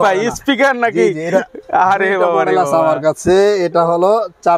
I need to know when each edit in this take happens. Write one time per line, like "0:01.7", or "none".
none